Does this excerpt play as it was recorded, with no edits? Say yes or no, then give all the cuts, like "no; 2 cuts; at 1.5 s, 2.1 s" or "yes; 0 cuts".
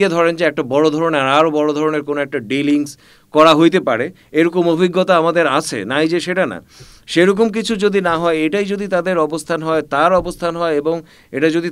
yes; 0 cuts